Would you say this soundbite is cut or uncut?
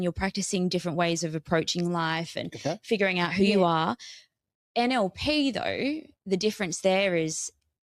uncut